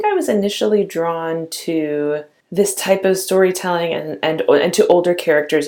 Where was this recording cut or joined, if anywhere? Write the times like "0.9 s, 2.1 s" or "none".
2.4 s